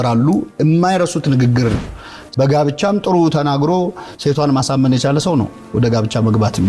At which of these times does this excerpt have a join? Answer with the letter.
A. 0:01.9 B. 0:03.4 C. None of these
A